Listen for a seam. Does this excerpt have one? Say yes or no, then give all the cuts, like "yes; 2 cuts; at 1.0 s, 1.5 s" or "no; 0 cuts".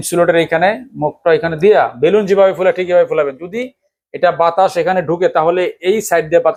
no; 0 cuts